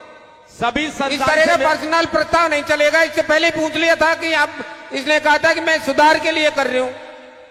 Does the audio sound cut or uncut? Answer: uncut